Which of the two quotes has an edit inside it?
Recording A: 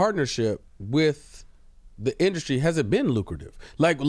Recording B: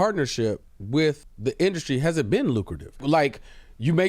B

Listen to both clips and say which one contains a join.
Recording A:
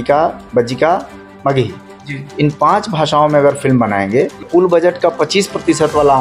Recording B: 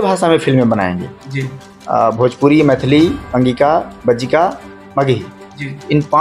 A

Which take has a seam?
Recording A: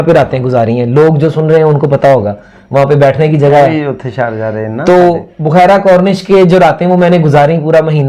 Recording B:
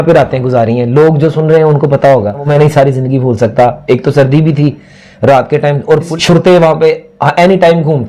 B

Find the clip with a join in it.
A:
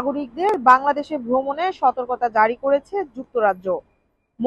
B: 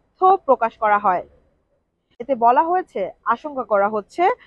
B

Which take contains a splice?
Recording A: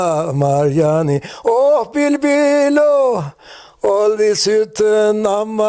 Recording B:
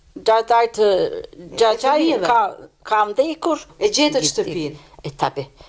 B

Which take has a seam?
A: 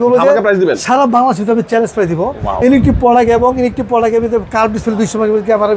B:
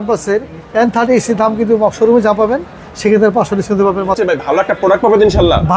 B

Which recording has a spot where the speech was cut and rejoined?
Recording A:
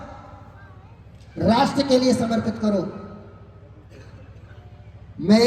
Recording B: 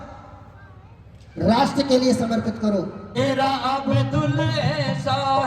B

